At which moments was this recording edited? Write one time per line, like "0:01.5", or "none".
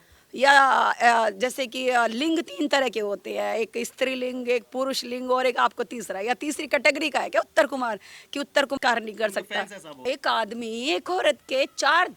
0:08.8
0:10.0